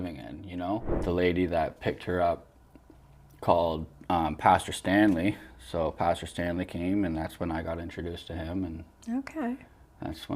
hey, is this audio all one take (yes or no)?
no